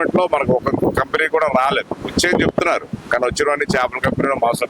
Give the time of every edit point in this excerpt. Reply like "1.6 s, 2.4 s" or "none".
none